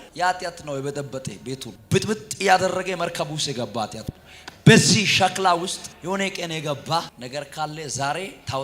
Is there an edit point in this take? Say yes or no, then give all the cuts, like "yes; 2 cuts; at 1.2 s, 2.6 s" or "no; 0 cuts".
yes; 3 cuts; at 1.7 s, 5.9 s, 7.2 s